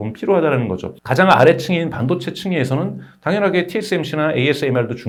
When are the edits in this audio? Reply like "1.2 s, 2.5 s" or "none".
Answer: none